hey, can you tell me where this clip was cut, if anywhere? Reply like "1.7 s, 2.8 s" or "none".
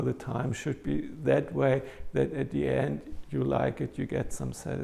none